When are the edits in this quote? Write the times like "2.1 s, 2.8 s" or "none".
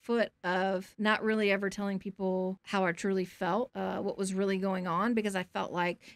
0.9 s, 2.6 s, 3.7 s